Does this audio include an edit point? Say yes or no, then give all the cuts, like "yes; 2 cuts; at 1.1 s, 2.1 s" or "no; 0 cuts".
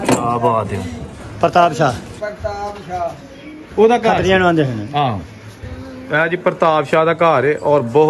yes; 1 cut; at 1.3 s